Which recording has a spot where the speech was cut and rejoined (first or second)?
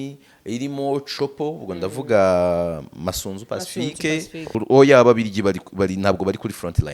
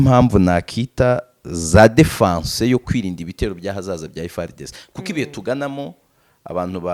first